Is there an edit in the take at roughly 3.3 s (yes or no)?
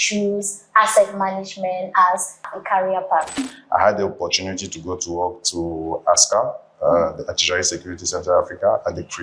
yes